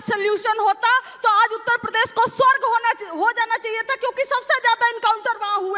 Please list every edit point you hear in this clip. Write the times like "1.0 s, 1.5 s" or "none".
none

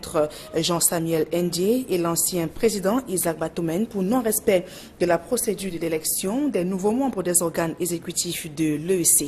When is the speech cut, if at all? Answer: 4.7 s

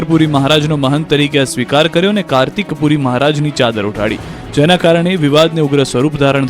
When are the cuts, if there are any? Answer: 5.3 s

